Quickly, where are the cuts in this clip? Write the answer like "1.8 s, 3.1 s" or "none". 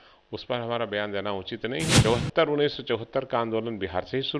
1.9 s